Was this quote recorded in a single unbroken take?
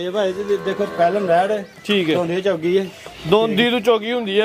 yes; 0 cuts

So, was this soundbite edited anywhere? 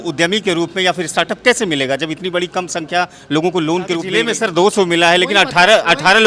yes; 1 cut; at 4.1 s

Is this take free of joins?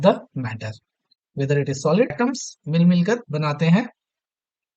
no; 1 cut; at 2.1 s

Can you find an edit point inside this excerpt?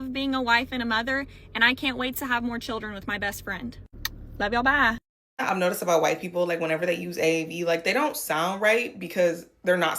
yes; 2 cuts; at 3.8 s, 5.1 s

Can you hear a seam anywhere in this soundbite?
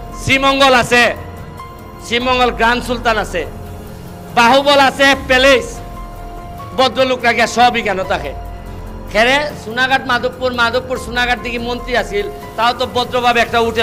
no; 0 cuts

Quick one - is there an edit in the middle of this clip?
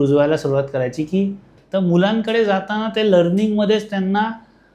yes; 1 cut; at 1.6 s

